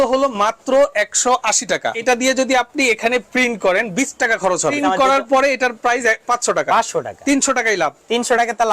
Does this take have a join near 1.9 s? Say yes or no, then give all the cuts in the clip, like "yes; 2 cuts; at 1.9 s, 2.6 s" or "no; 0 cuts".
yes; 2 cuts; at 1.9 s, 4.8 s